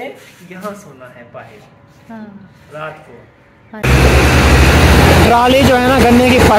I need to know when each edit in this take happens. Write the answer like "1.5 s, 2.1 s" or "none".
3.8 s